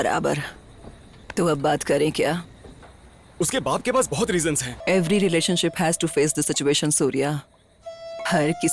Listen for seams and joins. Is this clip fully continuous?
no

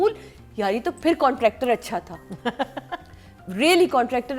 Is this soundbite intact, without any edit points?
yes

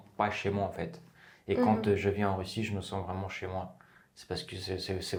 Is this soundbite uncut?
yes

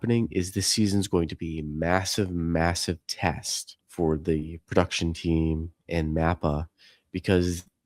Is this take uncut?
yes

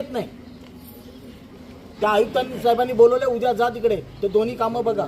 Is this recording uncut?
no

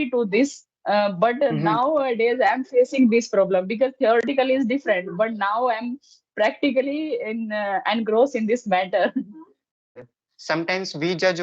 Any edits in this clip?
yes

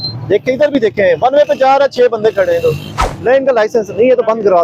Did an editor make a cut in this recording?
no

